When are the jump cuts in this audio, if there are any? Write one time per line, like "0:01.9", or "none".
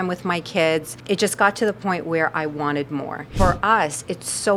0:00.9
0:03.3